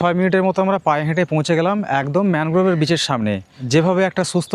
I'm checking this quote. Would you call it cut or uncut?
uncut